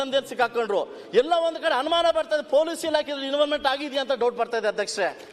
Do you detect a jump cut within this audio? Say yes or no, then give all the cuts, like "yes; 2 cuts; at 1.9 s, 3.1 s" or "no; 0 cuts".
no; 0 cuts